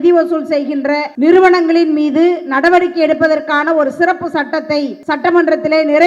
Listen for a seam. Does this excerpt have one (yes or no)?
yes